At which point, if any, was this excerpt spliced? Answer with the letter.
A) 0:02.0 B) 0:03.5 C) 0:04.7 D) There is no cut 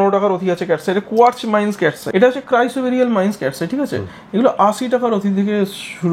A